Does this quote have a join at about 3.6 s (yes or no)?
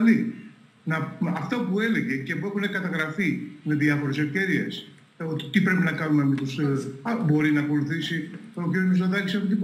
no